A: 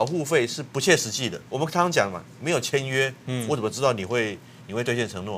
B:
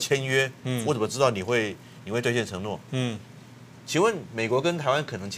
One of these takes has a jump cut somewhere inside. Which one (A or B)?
A